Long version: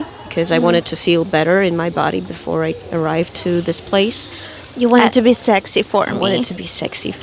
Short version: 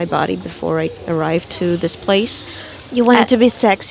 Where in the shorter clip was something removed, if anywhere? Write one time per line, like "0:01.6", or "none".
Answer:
none